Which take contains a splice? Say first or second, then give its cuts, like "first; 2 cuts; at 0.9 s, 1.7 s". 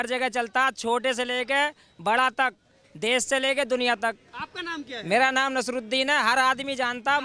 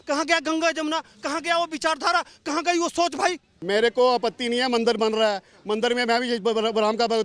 second; 1 cut; at 3.5 s